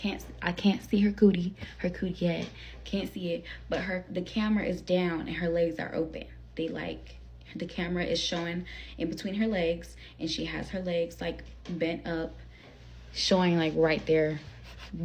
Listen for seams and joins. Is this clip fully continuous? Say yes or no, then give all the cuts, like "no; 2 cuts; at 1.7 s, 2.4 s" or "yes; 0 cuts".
yes; 0 cuts